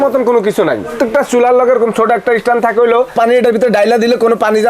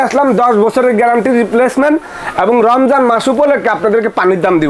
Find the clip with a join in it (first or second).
first